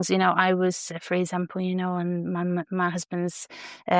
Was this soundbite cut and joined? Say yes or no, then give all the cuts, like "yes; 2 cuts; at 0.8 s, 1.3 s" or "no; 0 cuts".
no; 0 cuts